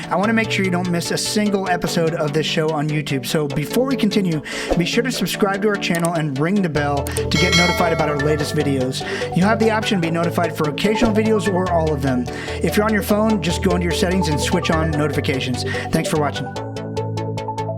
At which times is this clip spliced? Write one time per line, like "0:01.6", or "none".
none